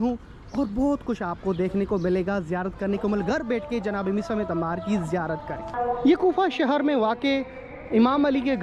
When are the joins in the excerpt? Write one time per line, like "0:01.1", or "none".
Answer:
0:05.7